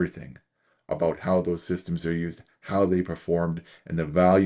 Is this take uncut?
yes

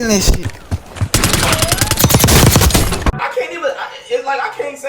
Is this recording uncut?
no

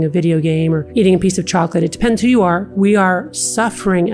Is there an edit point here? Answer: yes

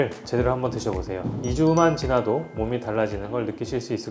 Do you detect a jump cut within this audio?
no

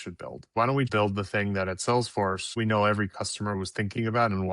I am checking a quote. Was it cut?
yes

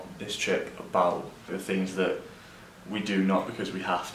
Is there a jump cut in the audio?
yes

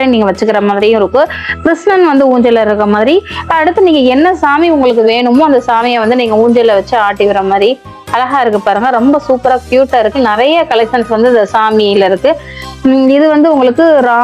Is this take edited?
no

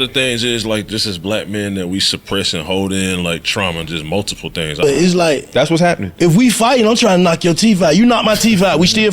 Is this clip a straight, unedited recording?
no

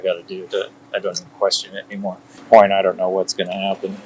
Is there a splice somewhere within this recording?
yes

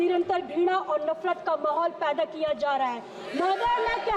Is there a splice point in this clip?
no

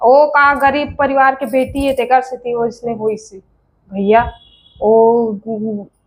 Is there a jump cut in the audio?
no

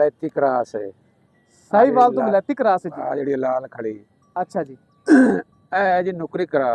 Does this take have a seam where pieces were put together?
no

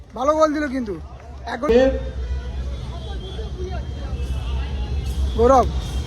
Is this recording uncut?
no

